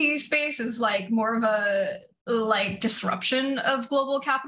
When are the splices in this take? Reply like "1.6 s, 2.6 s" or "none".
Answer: none